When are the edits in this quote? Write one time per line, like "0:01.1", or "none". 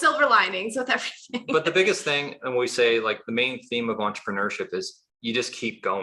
none